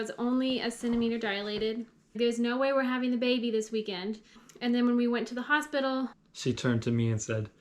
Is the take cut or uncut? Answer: cut